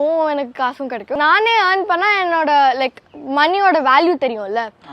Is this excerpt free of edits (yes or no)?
no